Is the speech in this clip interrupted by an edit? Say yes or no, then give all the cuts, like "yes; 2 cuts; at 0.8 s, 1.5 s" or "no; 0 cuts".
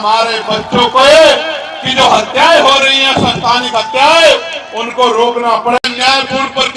yes; 1 cut; at 5.8 s